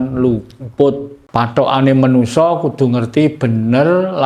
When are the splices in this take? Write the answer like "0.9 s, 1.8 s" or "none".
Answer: 1.1 s